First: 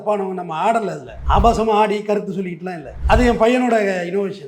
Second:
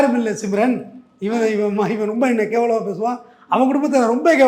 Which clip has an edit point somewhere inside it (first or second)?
first